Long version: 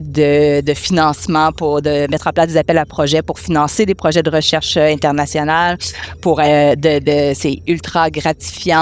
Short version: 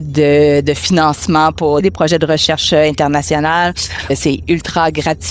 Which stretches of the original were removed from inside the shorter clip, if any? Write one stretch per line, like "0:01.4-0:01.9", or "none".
0:01.8-0:03.9
0:06.2-0:07.3